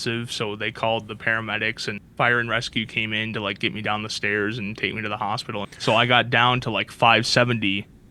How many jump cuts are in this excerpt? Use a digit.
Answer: 2